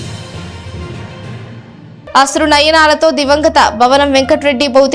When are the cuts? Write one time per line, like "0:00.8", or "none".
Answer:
0:01.9

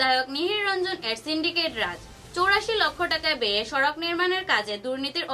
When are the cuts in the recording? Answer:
none

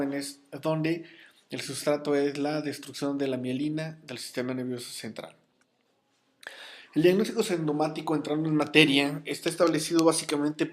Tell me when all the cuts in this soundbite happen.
0:02.6

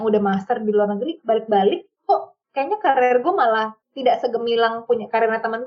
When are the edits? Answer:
none

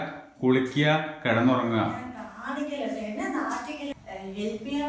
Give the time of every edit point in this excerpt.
0:04.0

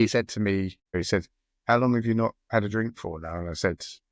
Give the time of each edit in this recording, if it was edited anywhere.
0:01.0

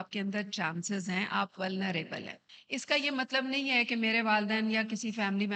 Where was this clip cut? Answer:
0:02.5

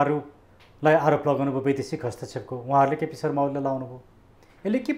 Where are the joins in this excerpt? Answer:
none

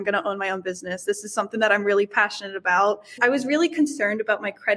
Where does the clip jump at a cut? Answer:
0:03.2

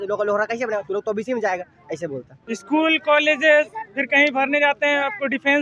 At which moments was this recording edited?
0:02.6

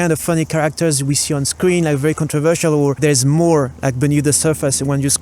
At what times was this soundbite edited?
0:03.0

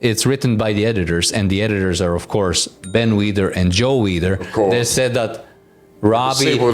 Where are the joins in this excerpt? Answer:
none

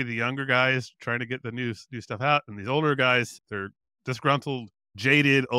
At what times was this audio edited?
0:03.4

